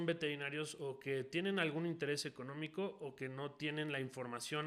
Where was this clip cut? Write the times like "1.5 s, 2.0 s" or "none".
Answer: none